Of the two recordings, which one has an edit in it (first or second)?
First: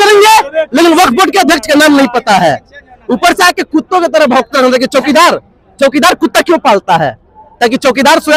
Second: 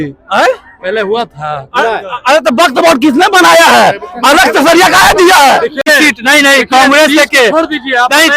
second